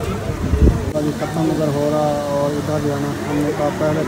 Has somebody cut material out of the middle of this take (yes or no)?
no